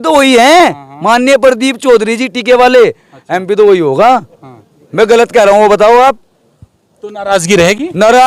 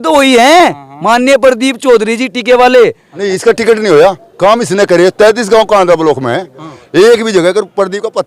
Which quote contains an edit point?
second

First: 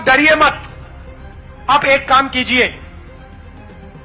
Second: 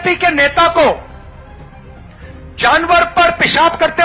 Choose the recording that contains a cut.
first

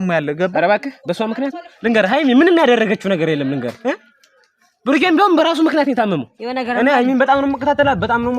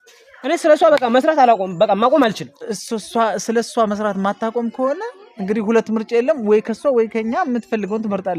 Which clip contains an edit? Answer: first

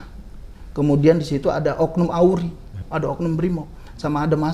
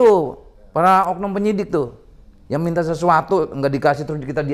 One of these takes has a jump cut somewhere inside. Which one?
first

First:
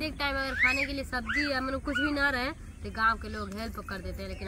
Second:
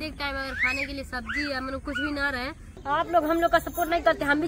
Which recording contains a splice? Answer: second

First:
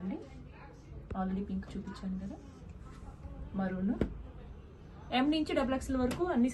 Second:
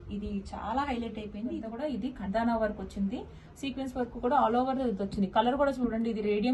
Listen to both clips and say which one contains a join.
second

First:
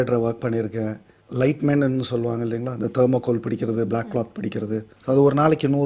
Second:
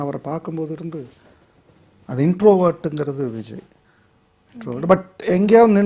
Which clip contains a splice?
first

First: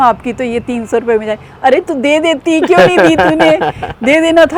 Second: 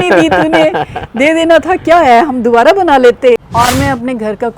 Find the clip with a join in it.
second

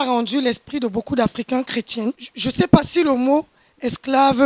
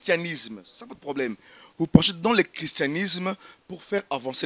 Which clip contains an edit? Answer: first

